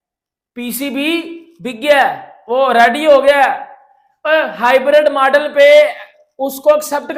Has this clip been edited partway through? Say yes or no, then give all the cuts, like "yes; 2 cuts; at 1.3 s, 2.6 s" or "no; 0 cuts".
no; 0 cuts